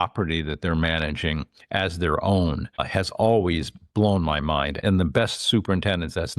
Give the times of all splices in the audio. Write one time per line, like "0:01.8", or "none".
0:02.9
0:04.8